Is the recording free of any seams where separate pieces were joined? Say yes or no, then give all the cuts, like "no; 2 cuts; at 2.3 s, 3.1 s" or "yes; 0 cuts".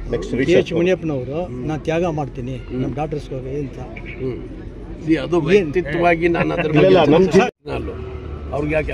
no; 1 cut; at 7.6 s